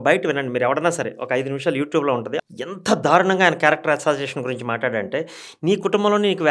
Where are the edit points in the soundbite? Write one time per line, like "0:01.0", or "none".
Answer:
0:02.4